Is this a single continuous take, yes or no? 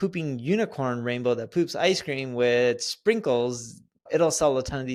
yes